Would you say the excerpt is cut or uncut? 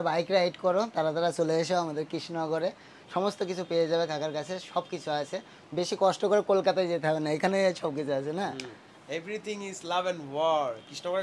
uncut